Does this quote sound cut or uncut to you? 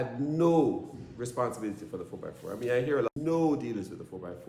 cut